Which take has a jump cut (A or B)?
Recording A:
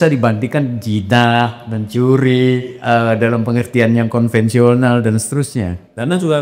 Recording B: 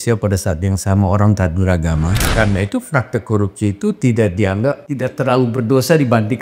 B